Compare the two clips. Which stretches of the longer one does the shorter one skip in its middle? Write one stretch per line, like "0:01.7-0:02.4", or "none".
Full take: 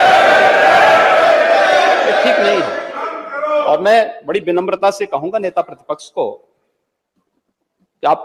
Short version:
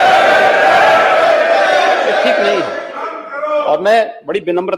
none